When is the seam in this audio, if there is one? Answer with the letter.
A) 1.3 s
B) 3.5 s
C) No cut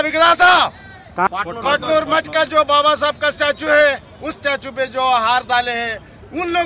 A